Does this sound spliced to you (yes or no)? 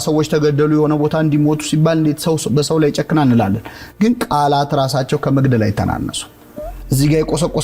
no